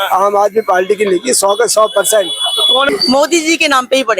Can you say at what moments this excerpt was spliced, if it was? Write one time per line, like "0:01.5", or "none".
0:02.9